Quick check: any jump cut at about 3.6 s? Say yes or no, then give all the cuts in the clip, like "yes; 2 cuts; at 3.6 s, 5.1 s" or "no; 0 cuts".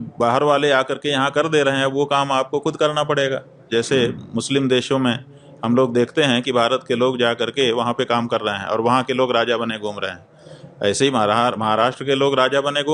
yes; 1 cut; at 3.6 s